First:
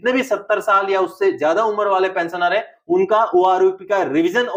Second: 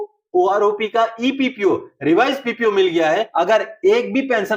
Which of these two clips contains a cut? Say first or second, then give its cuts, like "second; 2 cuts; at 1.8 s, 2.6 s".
second; 1 cut; at 3.3 s